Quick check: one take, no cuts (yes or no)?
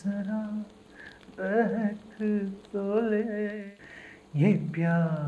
no